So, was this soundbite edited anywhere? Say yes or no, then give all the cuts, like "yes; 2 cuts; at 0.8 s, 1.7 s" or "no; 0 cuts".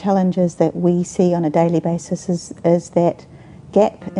no; 0 cuts